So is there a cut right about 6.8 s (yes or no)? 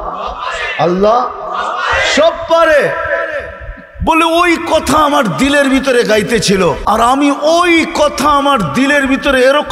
yes